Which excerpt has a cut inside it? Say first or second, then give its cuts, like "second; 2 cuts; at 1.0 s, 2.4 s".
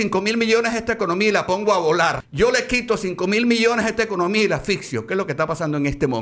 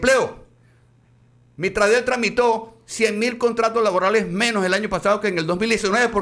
first; 1 cut; at 2.2 s